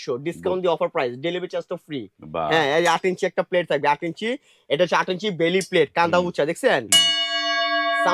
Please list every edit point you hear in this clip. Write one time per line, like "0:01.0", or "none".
none